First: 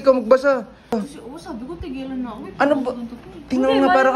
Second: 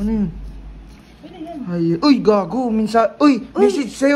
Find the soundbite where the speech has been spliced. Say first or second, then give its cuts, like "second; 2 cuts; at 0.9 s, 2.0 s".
first; 1 cut; at 1.0 s